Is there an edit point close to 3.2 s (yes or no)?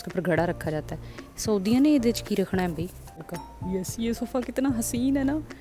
yes